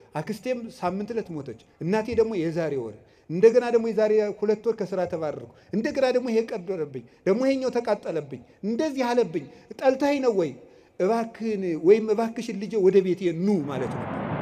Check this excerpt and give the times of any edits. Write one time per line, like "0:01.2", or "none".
none